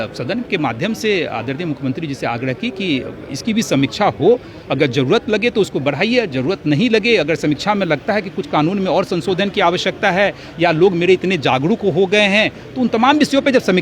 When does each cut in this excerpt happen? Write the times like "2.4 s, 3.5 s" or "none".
none